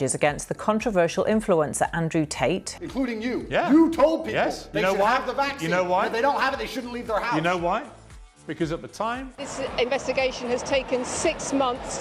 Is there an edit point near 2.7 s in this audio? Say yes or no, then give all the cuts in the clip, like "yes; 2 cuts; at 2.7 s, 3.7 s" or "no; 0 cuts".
yes; 2 cuts; at 2.7 s, 9.3 s